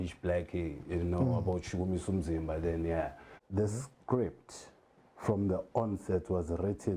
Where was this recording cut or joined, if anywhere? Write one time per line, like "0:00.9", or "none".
0:03.3